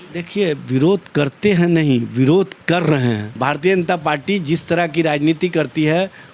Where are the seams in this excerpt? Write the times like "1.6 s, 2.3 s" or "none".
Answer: 3.3 s